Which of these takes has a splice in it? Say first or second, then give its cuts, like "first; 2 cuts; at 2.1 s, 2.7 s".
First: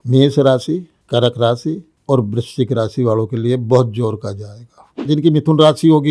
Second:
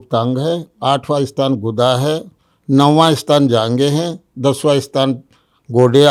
first; 3 cuts; at 0.9 s, 1.9 s, 5.1 s